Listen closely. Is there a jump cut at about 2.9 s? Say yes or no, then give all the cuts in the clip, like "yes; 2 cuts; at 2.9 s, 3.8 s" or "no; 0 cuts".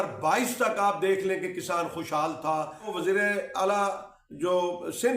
yes; 1 cut; at 2.9 s